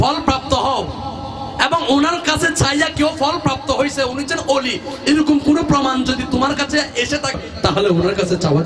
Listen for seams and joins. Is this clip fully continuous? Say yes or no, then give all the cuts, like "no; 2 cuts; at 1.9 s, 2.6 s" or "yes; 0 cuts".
no; 1 cut; at 7.4 s